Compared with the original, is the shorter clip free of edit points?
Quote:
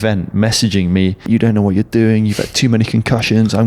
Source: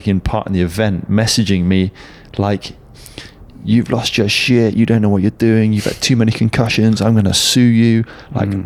no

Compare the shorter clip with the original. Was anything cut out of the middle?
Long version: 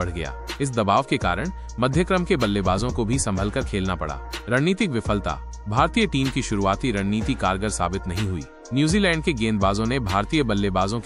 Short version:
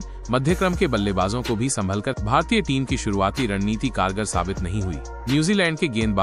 yes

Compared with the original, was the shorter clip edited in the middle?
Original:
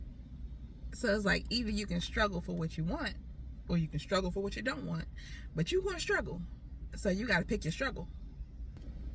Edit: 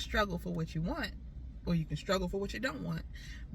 no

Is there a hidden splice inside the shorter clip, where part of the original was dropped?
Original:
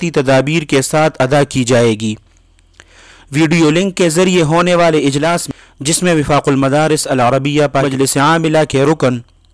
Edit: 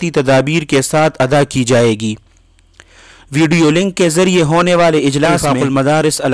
yes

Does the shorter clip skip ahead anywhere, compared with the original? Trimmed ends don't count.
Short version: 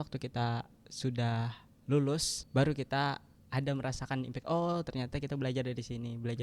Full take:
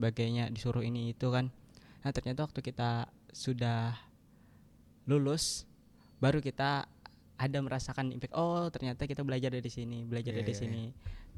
yes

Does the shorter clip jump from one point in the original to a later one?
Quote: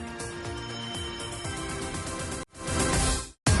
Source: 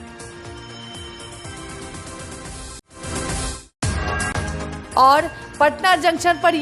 yes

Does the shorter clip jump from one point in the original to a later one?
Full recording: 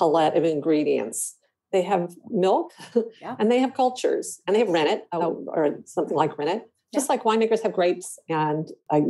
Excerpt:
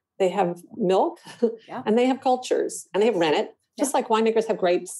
yes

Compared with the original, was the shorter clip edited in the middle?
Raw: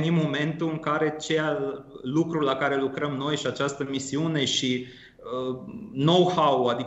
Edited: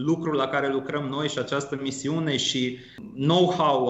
yes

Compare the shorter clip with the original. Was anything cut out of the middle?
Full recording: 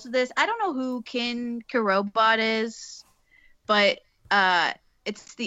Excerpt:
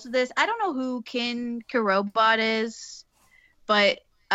no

